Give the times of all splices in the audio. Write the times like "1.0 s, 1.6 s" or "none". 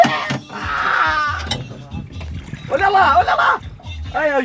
none